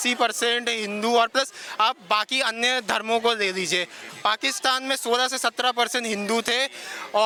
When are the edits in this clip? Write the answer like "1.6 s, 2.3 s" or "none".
none